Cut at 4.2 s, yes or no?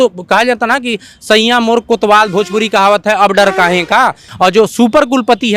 yes